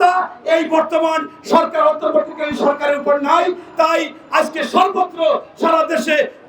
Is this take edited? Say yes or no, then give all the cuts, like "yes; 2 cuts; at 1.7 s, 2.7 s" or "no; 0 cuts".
no; 0 cuts